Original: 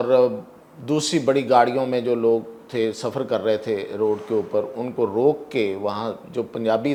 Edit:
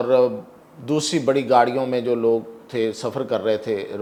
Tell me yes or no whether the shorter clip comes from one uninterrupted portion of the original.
yes